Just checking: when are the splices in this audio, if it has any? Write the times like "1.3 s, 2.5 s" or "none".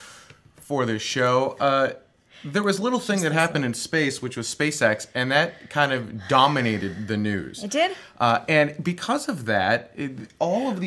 8.4 s